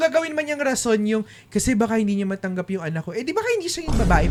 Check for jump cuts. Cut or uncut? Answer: uncut